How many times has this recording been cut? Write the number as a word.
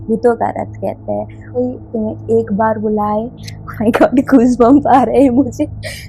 one